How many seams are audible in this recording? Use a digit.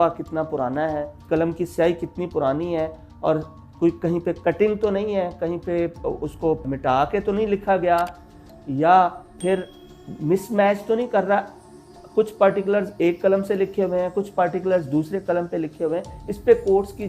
1